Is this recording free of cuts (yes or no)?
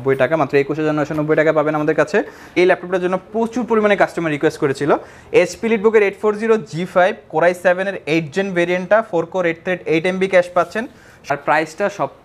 no